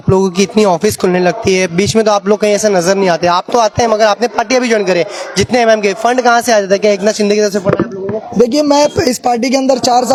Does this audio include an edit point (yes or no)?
no